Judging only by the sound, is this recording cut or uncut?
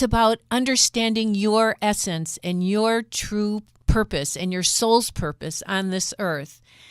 cut